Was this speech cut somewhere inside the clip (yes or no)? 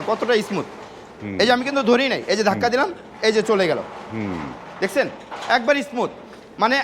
no